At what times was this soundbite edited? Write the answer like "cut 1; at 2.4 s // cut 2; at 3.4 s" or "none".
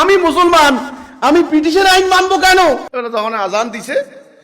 cut 1; at 2.9 s